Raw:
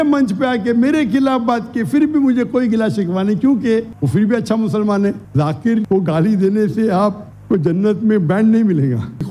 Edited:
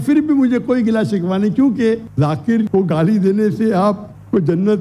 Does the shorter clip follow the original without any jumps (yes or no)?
no